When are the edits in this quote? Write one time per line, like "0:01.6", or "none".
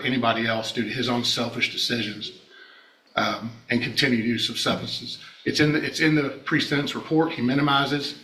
none

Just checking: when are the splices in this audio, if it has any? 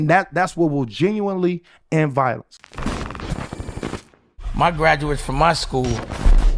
0:02.6

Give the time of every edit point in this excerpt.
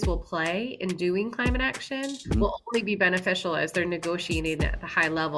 none

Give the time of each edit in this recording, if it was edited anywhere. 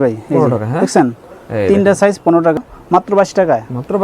0:02.6

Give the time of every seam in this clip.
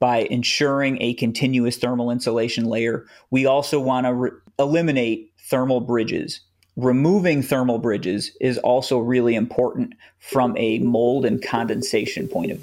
none

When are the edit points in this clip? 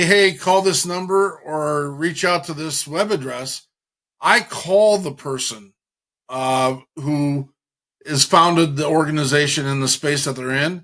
none

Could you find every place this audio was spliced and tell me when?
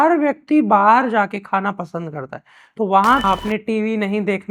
0:03.4

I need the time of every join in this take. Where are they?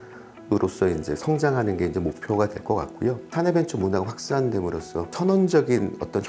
0:03.3
0:05.1

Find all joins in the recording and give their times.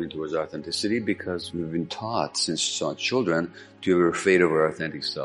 0:01.4

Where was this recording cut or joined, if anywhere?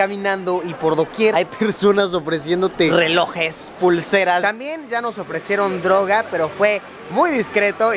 0:01.3
0:02.9
0:04.4

